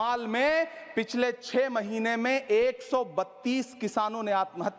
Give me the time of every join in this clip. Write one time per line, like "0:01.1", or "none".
none